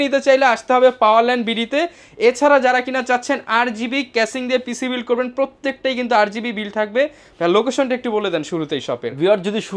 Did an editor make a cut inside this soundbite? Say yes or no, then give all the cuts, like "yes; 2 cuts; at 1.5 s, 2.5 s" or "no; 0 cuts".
no; 0 cuts